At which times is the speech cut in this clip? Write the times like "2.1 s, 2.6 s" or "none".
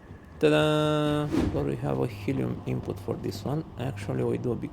1.4 s

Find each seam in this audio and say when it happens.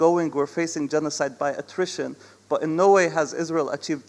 none

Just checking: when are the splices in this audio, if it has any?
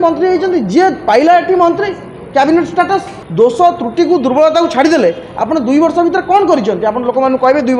3.2 s

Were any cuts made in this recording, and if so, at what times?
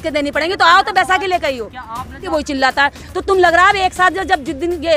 2.2 s

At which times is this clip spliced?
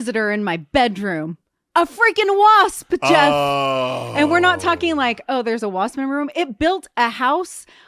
1.5 s

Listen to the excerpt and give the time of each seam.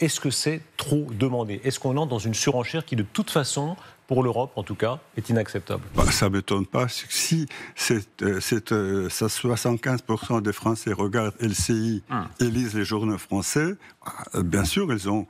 5.8 s

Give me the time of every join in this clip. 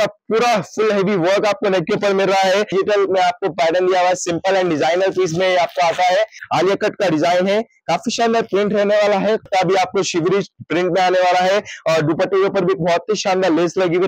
2.7 s, 6.4 s, 9.5 s

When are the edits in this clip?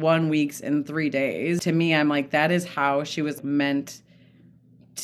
1.6 s, 3.4 s

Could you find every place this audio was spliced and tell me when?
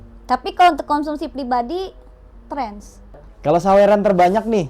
3.2 s

